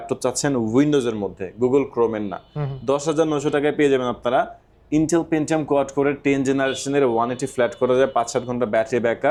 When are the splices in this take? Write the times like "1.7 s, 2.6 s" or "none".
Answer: none